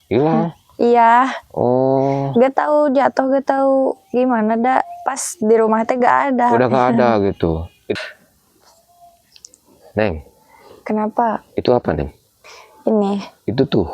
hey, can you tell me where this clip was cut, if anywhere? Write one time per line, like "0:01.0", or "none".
0:08.0